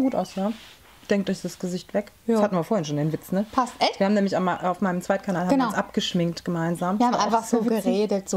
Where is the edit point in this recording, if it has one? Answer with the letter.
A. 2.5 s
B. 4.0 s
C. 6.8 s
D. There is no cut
D